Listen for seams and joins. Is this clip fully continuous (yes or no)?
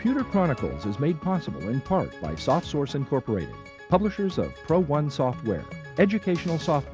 yes